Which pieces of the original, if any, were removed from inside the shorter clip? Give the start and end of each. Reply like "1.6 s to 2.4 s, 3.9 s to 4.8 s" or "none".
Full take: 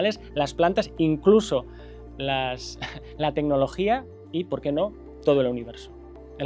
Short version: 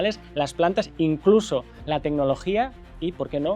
1.7 s to 3.1 s